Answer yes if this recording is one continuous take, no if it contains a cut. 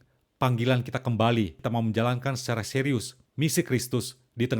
no